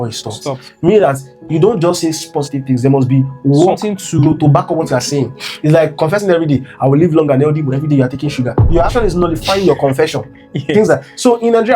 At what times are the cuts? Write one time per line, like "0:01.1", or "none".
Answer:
0:08.6